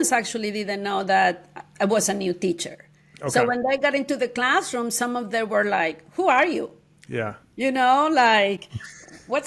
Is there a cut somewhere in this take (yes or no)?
no